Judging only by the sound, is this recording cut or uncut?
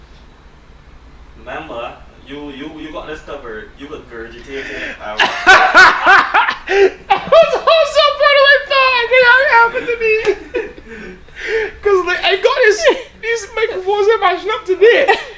uncut